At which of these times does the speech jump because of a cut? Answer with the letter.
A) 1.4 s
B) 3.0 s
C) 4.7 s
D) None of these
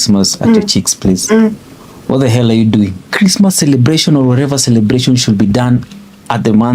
B